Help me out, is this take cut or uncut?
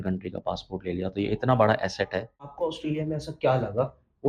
cut